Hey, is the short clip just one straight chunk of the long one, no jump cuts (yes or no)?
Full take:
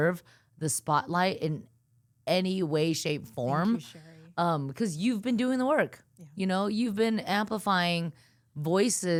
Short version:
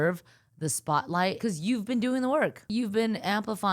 no